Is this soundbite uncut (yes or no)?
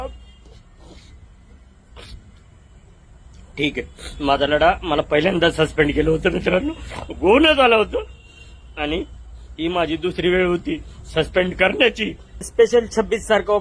no